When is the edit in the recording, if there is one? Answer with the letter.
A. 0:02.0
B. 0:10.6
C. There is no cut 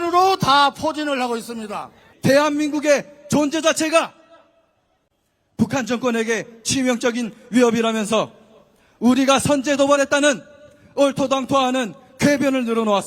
A